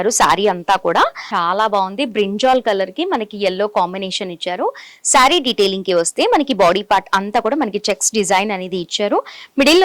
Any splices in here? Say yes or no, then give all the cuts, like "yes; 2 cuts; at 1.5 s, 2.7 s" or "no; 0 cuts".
yes; 1 cut; at 1.2 s